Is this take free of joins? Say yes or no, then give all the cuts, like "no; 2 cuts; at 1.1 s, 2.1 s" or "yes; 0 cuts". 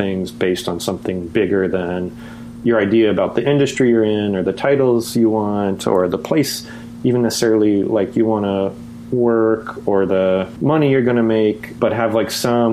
yes; 0 cuts